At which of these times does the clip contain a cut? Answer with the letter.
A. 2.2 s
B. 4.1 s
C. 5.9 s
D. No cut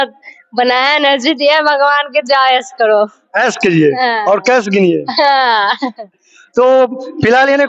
D